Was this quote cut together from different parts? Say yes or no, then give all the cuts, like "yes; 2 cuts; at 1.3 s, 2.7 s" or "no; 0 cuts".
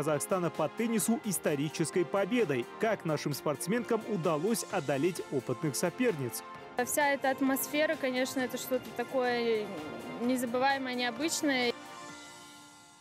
yes; 1 cut; at 11.7 s